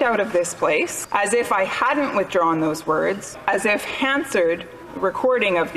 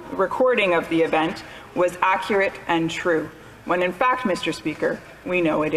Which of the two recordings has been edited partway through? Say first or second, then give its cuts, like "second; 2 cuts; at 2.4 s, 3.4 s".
first; 2 cuts; at 1.0 s, 3.4 s